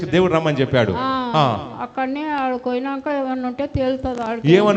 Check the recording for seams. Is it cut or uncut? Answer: uncut